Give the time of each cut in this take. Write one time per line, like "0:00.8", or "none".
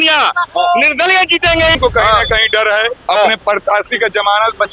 0:01.8